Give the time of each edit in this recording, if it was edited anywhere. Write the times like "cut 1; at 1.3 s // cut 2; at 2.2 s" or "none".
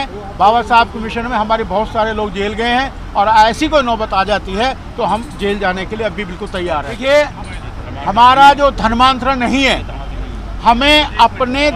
cut 1; at 6.9 s